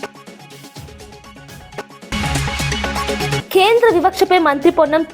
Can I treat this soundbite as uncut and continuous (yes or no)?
yes